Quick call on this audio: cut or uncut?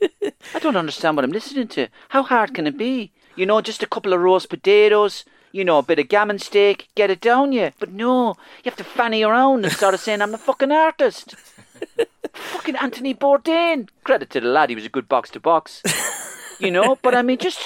cut